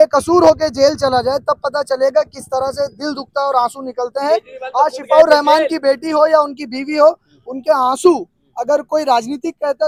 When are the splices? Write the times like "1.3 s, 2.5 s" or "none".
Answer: none